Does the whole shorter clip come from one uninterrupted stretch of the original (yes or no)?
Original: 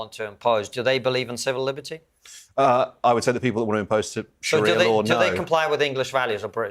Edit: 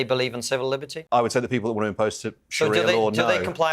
no